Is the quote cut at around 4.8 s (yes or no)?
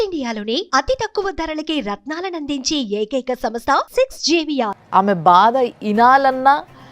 yes